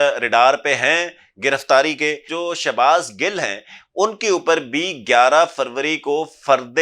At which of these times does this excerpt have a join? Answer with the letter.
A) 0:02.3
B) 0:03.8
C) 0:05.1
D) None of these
A